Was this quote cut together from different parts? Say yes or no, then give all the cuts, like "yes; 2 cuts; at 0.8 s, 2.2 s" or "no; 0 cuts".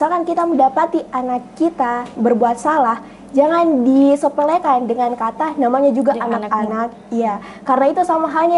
no; 0 cuts